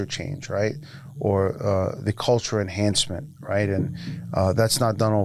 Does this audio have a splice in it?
no; 0 cuts

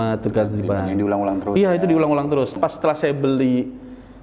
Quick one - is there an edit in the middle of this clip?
yes; 1 cut; at 2.6 s

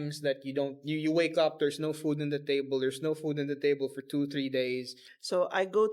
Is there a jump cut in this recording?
yes; 1 cut; at 5.0 s

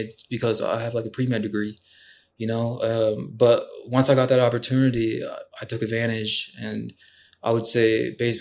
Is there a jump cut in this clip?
no; 0 cuts

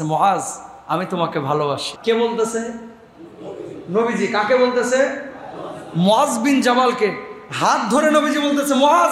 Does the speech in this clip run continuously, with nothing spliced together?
no; 1 cut; at 1.9 s

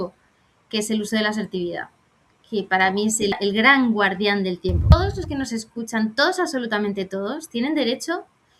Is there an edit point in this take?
yes; 2 cuts; at 3.4 s, 4.9 s

